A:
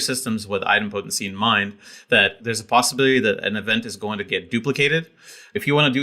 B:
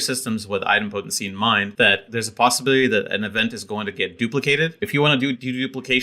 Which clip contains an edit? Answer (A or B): B